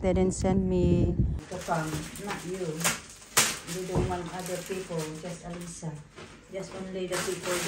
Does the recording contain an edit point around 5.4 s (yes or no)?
no